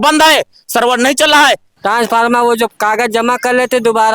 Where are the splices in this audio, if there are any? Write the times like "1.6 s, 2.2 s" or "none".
1.7 s